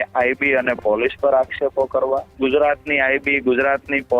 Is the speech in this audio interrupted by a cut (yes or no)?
yes